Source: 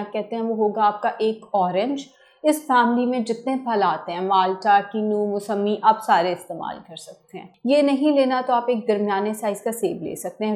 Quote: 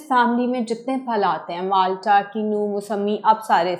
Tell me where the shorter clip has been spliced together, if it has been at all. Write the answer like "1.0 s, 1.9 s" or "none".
none